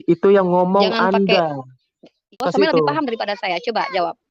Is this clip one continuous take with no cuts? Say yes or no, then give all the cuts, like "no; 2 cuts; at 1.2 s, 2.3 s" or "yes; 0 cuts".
no; 1 cut; at 2.4 s